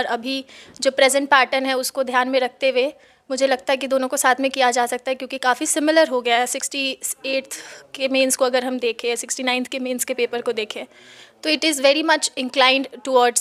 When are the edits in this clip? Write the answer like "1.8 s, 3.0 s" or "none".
none